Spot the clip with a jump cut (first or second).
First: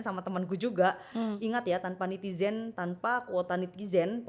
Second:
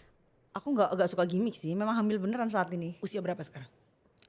second